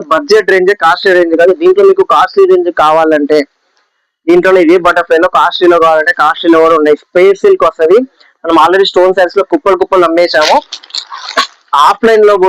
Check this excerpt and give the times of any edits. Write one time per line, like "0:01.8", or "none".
none